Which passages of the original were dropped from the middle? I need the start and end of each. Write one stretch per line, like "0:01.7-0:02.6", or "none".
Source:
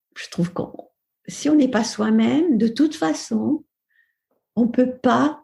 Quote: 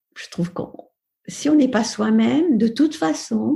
none